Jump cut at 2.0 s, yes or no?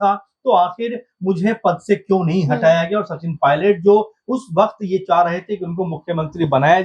no